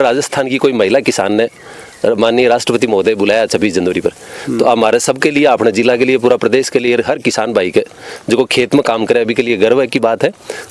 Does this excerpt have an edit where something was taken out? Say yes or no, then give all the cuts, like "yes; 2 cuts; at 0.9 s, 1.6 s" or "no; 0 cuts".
no; 0 cuts